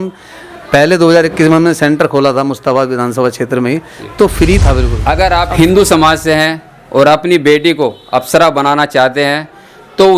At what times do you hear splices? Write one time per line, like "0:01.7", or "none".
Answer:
0:04.9